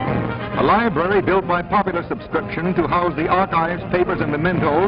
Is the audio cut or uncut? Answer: uncut